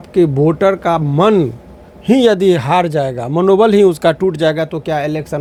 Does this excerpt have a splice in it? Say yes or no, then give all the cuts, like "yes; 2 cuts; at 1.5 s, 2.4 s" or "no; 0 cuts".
no; 0 cuts